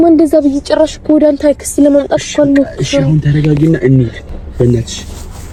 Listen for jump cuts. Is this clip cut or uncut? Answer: uncut